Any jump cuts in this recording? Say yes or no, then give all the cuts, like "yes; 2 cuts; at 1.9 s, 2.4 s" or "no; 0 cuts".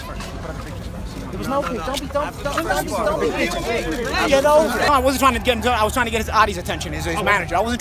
no; 0 cuts